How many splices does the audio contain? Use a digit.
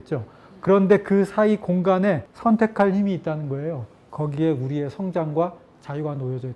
1